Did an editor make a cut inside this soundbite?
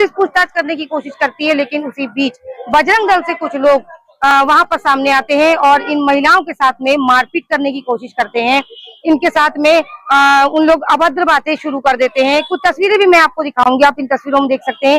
no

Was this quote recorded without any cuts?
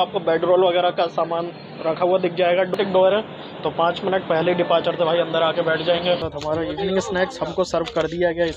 no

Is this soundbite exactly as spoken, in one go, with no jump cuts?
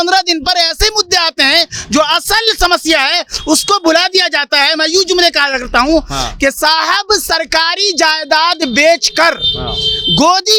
yes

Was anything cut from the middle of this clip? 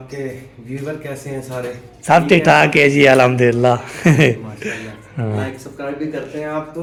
no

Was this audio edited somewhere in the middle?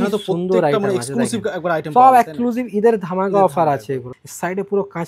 yes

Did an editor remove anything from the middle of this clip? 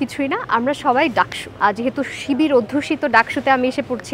yes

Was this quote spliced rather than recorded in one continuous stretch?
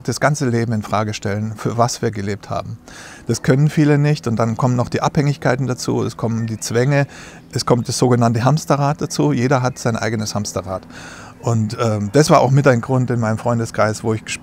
no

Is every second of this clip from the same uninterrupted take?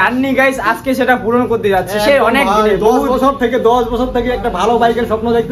yes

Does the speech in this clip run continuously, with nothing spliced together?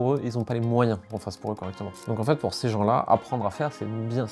yes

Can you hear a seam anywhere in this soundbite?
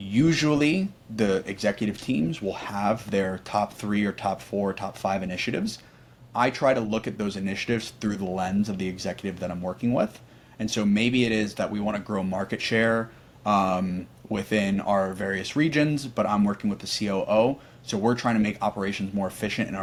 no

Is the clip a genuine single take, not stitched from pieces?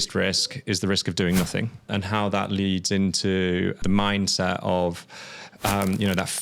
no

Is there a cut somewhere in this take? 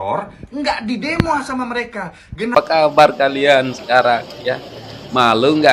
yes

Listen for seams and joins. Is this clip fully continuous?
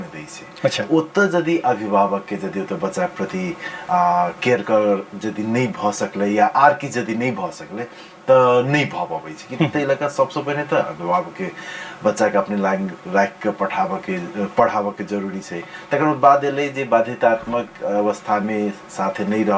yes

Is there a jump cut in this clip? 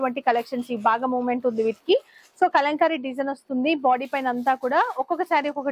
no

